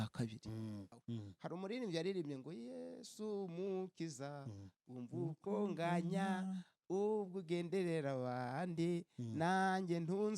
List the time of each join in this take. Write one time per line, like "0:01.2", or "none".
0:00.9